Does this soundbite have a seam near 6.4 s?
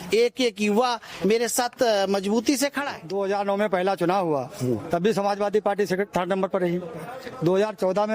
no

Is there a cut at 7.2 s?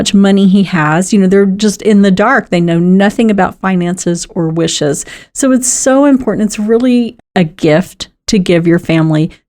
yes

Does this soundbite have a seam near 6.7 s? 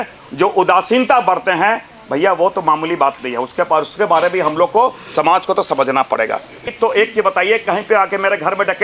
yes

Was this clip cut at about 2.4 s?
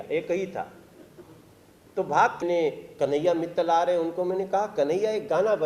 yes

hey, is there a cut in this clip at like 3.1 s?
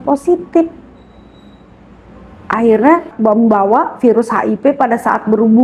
yes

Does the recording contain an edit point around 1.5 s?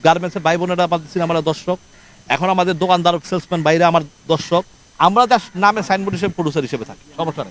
no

